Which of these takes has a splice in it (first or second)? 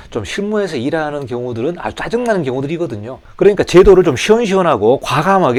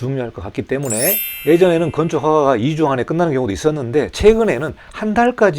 second